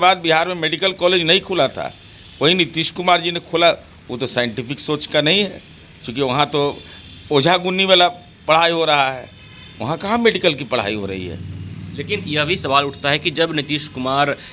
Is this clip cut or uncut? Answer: uncut